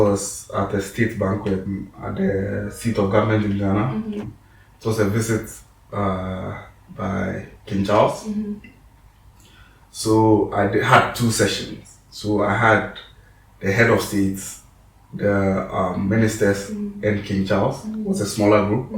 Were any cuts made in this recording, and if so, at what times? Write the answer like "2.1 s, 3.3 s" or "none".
1.7 s, 4.2 s